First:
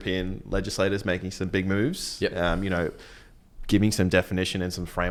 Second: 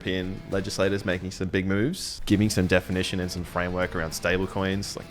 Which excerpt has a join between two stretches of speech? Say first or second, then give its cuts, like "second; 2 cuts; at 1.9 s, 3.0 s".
second; 1 cut; at 2.1 s